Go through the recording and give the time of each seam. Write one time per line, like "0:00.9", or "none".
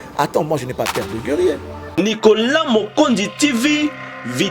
0:01.8